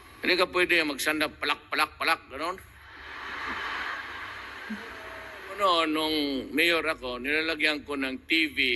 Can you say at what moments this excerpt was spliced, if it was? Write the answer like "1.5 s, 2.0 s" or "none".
5.6 s